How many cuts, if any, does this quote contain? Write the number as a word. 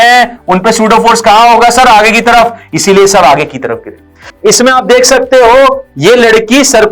one